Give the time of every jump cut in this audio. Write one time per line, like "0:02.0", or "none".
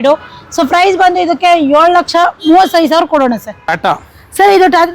0:03.7